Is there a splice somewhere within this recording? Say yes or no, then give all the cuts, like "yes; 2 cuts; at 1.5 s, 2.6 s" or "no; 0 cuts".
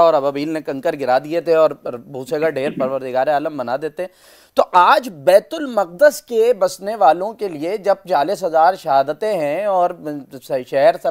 no; 0 cuts